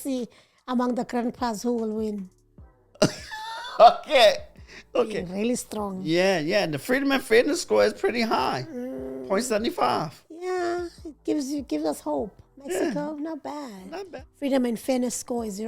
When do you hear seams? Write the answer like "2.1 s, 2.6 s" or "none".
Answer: 5.2 s, 13.9 s